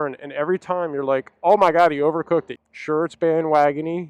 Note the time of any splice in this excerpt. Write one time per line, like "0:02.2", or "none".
0:02.5